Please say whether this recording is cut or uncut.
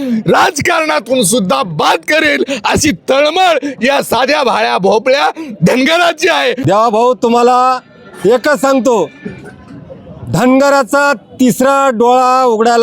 cut